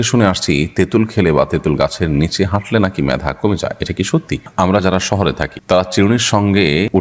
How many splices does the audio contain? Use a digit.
1